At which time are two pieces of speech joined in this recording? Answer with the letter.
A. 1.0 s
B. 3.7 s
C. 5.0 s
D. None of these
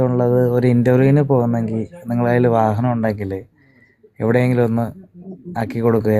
D